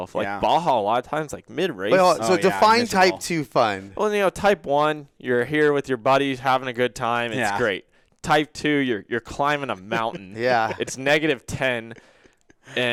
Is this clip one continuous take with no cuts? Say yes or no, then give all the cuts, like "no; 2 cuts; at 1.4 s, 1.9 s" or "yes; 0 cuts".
yes; 0 cuts